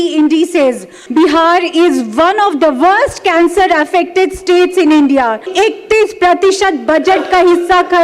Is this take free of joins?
no; 2 cuts; at 0.9 s, 5.5 s

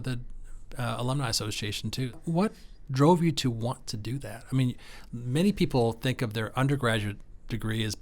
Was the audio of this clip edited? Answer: yes; 1 cut; at 2.1 s

